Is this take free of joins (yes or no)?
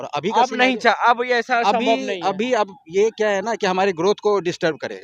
yes